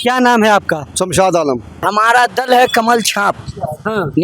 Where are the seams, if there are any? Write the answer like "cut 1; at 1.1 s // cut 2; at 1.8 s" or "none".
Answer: cut 1; at 1.8 s